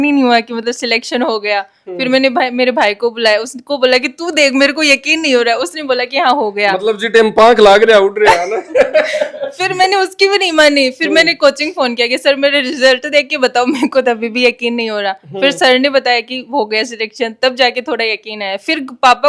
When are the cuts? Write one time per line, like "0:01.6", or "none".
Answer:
none